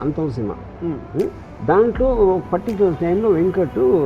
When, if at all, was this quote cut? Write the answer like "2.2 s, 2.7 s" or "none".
1.5 s